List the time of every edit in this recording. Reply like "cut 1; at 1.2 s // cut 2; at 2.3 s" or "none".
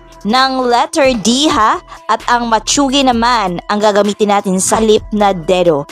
cut 1; at 4.8 s